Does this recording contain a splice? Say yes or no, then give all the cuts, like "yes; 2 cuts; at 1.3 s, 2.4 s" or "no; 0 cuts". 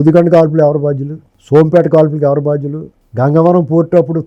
no; 0 cuts